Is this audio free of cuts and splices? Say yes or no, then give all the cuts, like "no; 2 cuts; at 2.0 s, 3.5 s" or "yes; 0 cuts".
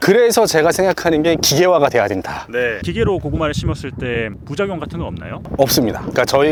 yes; 0 cuts